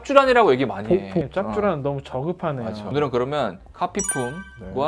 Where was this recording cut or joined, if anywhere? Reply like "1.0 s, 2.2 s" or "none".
2.9 s

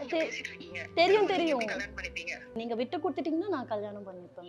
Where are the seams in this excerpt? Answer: 2.5 s

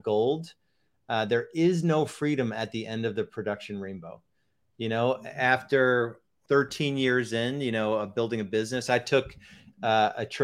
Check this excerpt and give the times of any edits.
6.4 s

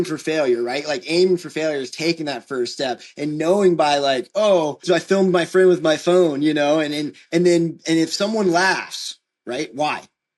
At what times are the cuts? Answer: 4.8 s

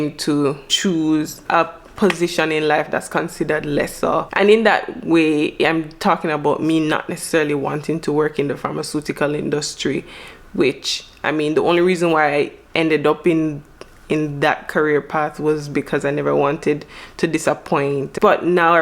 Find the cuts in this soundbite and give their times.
none

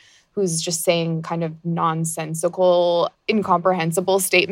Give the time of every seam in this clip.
3.2 s

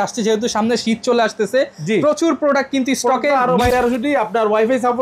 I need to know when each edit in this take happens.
3.7 s

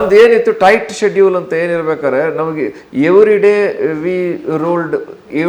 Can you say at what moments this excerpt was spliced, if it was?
none

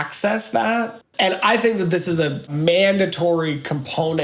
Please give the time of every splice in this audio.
1.0 s, 2.5 s

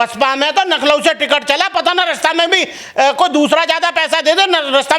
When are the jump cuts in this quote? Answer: none

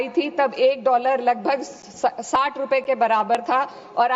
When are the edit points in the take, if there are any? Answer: none

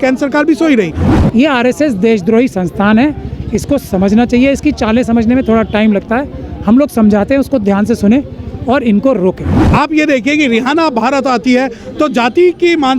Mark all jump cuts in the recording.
1.1 s, 9.5 s

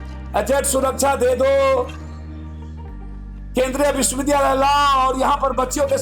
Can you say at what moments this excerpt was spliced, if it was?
2.3 s, 3.5 s

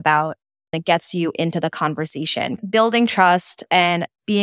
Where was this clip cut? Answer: 0.8 s, 2.6 s

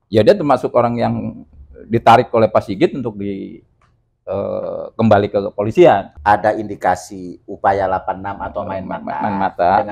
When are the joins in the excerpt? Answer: 6.1 s

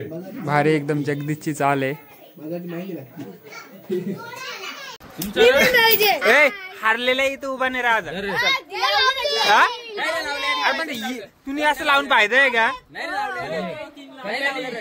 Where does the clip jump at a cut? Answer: 5.1 s

